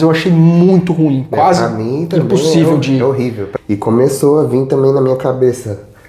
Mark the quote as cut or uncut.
cut